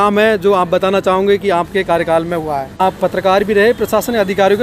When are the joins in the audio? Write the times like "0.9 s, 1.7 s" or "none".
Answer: 2.8 s